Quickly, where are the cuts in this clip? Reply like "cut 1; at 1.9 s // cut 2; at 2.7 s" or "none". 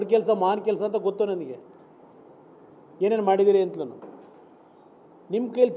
none

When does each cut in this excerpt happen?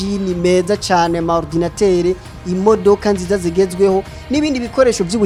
none

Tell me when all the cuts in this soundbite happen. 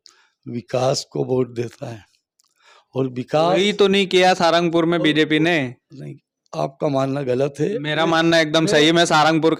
none

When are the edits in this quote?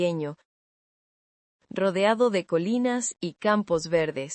cut 1; at 3.2 s

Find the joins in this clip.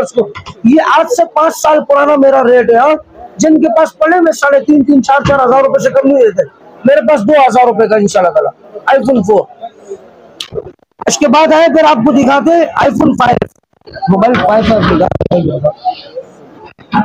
none

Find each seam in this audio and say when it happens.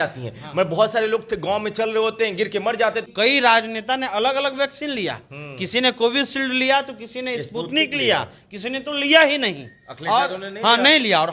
cut 1; at 3.0 s

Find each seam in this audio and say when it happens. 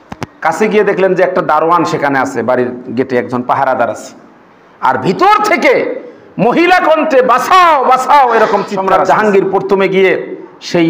cut 1; at 8.7 s

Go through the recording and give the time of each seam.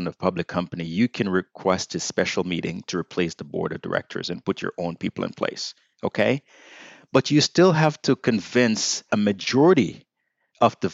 cut 1; at 9.0 s

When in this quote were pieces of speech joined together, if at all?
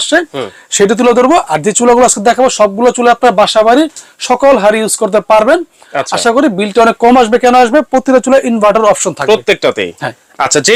none

